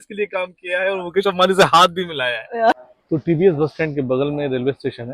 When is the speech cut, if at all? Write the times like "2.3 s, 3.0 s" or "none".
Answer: 2.8 s

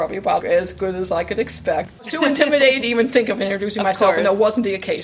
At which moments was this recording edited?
2.0 s

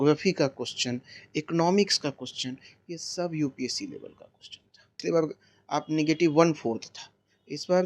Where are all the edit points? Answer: 4.9 s

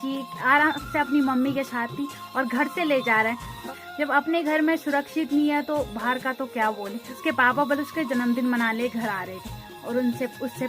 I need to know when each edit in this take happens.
3.7 s, 7.1 s

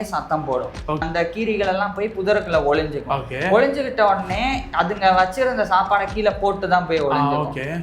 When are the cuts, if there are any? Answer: 1.0 s

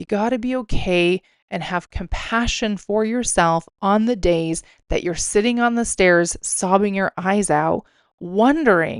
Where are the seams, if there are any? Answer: none

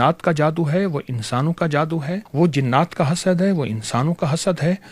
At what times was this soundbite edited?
2.2 s

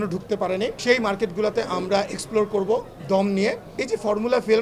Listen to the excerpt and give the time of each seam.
3.7 s

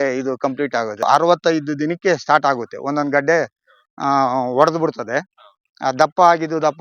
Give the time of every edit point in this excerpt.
1.0 s

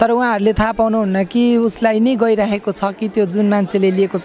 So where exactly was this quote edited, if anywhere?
none

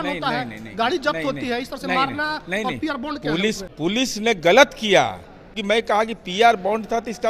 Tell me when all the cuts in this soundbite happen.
3.7 s, 5.5 s

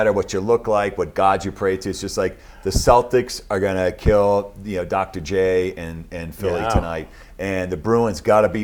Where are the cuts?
none

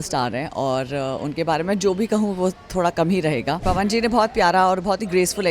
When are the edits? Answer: 3.6 s

